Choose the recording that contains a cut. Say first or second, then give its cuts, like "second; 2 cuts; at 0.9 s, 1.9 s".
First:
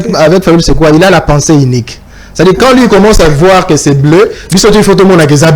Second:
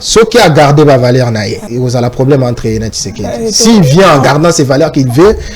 second; 1 cut; at 1.6 s